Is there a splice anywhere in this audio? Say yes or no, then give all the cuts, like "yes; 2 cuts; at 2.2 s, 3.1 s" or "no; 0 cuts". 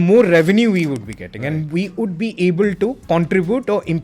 yes; 1 cut; at 3.0 s